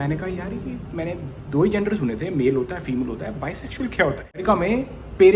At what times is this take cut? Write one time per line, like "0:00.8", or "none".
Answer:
0:04.4